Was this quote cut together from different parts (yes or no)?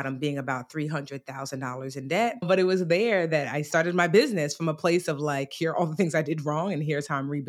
yes